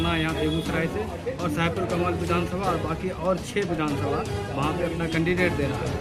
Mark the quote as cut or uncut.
uncut